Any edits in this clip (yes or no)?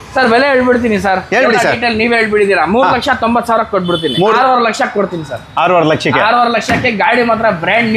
yes